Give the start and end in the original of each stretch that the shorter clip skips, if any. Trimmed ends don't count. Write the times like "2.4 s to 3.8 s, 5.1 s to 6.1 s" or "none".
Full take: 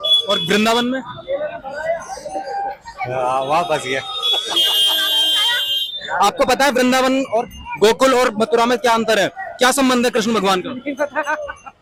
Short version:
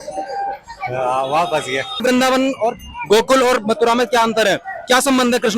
4.2 s to 6.7 s